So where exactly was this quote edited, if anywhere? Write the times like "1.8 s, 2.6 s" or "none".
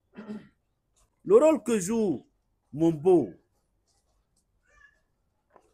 1.0 s